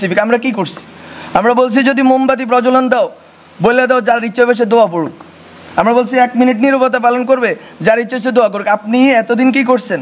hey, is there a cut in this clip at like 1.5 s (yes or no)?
no